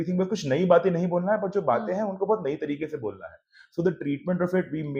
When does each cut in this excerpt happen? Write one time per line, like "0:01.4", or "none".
none